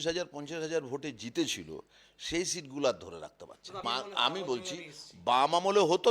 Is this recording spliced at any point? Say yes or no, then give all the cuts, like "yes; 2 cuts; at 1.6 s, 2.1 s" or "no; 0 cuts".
yes; 1 cut; at 3.8 s